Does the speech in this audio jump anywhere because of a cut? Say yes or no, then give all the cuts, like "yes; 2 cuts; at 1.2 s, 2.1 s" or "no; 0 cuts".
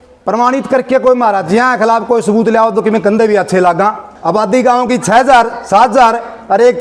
yes; 1 cut; at 4.1 s